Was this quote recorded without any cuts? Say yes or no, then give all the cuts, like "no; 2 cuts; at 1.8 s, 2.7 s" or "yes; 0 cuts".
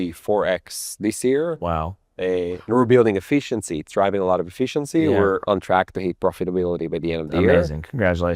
yes; 0 cuts